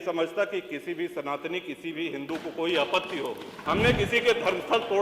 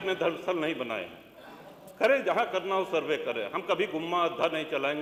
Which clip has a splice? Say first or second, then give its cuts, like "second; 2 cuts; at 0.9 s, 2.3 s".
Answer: first; 1 cut; at 3.5 s